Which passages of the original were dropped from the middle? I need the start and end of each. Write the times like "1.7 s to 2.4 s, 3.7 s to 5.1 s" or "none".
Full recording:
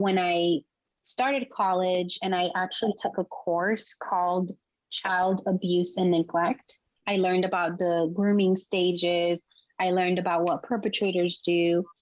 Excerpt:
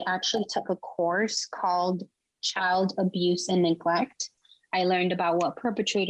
6.9 s to 9.5 s